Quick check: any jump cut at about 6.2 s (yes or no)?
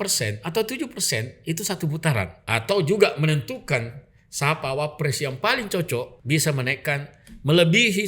yes